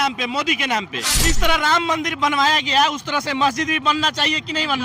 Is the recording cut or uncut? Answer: cut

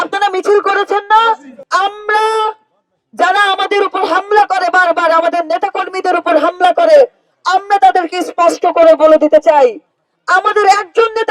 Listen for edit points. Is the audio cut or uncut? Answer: cut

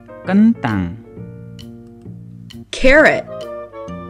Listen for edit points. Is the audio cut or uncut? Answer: uncut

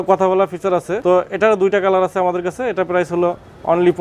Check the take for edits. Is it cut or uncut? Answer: cut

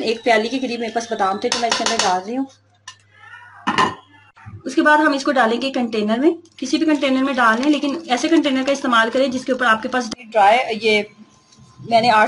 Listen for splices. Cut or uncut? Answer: cut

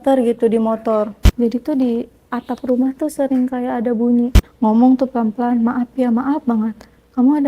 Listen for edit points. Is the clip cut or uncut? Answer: cut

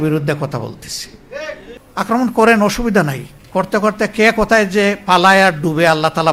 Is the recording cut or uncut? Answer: cut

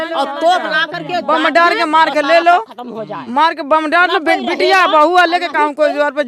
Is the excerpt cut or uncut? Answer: uncut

